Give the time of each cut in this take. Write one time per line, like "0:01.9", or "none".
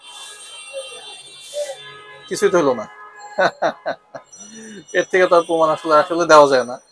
none